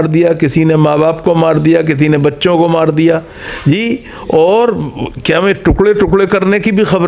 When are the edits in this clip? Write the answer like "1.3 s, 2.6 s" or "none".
none

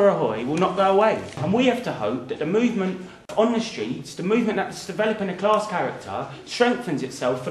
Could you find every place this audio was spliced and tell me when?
1.4 s, 3.3 s

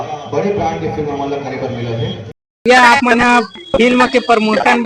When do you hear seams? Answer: 2.6 s

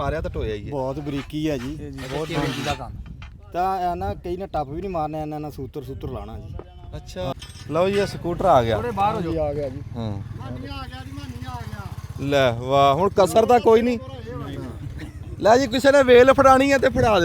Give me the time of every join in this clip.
7.3 s

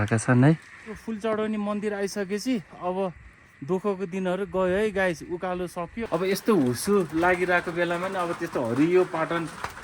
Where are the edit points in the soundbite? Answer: 1.0 s, 5.9 s

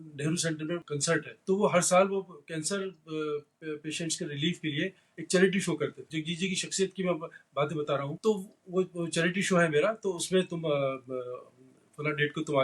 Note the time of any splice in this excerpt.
0.9 s, 6.0 s, 8.1 s

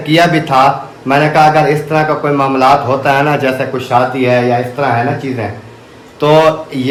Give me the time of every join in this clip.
none

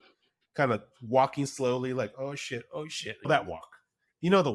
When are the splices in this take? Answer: none

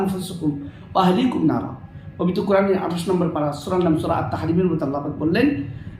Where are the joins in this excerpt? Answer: none

